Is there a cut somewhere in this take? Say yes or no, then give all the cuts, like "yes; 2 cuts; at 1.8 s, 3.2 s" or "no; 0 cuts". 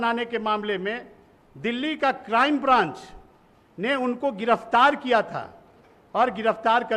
no; 0 cuts